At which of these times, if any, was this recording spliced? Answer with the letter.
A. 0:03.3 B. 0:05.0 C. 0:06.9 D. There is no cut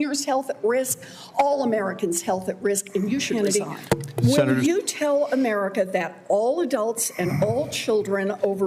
A